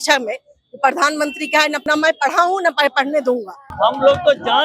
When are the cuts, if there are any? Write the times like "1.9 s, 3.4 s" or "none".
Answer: 1.8 s, 3.7 s